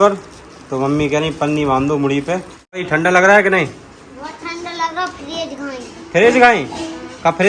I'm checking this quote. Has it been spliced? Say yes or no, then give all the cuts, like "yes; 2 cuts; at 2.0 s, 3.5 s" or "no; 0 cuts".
yes; 1 cut; at 2.8 s